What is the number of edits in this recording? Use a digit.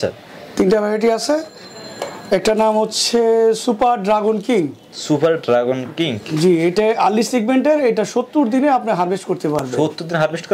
0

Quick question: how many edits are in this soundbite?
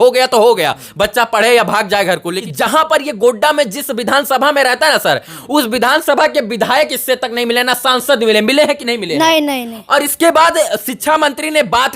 1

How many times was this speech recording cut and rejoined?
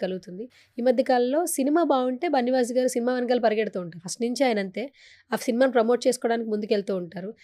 0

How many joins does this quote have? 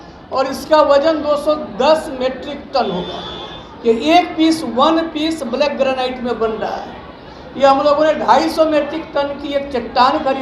0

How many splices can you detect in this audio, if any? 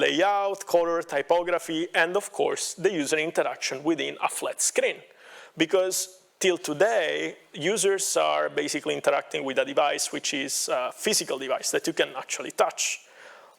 0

